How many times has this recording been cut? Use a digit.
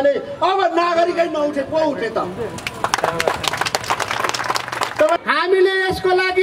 1